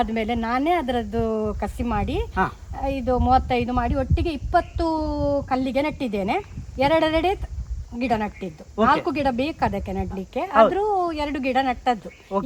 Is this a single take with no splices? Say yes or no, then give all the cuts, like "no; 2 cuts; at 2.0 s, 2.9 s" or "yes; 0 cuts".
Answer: yes; 0 cuts